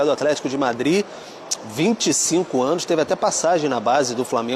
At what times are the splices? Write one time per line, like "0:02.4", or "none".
none